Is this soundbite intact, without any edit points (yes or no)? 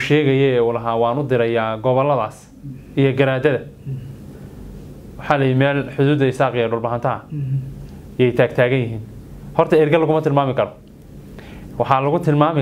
yes